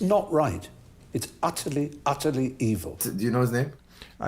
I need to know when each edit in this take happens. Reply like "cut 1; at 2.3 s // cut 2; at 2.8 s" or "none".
cut 1; at 3.1 s

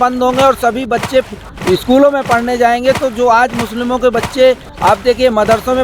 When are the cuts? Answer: none

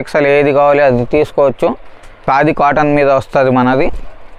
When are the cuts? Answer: cut 1; at 2.1 s

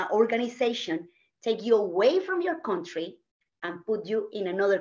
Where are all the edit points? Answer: none

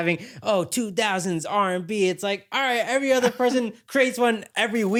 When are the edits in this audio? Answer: none

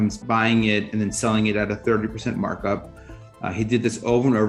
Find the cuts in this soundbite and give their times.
cut 1; at 3.5 s

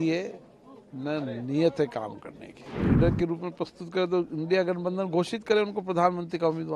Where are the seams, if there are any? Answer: cut 1; at 2.7 s

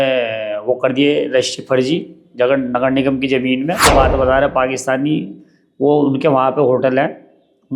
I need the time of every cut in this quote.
cut 1; at 3.9 s

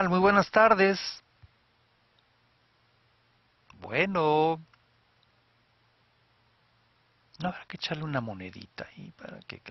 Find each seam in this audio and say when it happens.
none

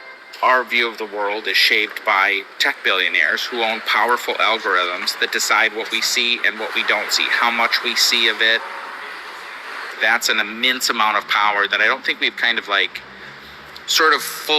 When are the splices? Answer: cut 1; at 9.4 s

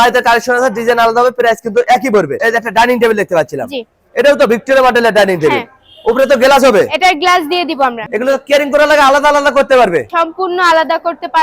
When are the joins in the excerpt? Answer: cut 1; at 2.4 s // cut 2; at 8.0 s

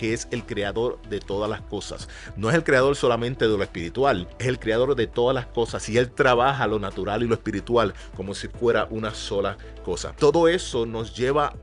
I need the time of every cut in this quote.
cut 1; at 4.3 s // cut 2; at 10.1 s

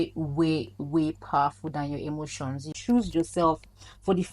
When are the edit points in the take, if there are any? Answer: cut 1; at 2.6 s

